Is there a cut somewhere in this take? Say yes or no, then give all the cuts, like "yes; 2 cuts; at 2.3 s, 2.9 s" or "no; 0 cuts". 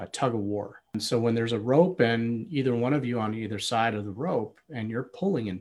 yes; 1 cut; at 0.9 s